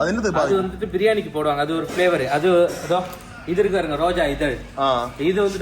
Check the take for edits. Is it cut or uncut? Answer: uncut